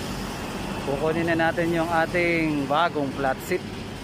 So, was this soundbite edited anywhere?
no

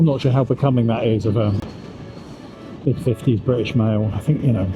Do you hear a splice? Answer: yes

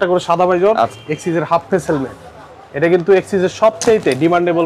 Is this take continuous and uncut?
no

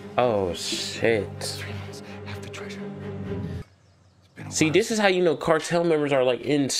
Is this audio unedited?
no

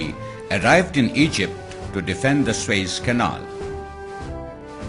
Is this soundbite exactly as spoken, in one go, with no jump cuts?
no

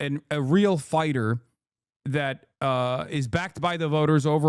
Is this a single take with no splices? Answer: yes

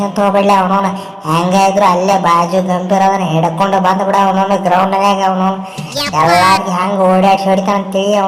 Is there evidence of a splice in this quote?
no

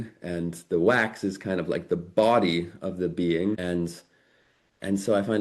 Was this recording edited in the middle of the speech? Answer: yes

